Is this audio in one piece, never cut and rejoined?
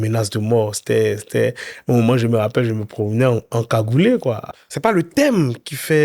no; 1 cut; at 4.5 s

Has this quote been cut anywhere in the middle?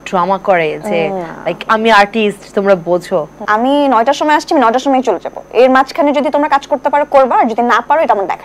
yes; 1 cut; at 3.4 s

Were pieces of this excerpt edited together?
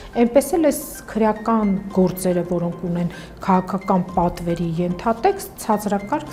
no; 0 cuts

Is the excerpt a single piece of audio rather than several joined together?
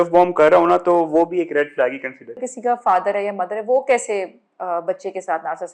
no; 1 cut; at 2.5 s

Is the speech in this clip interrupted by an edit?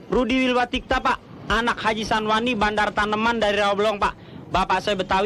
no; 0 cuts

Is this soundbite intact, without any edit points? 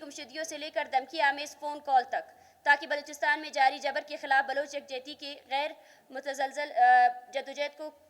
yes; 0 cuts

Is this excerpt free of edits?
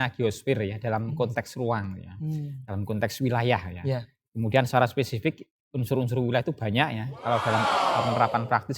yes; 0 cuts

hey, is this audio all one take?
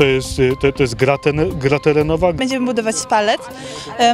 no; 1 cut; at 2.4 s

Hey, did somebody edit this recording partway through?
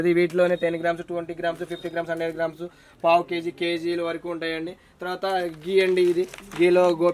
no; 0 cuts

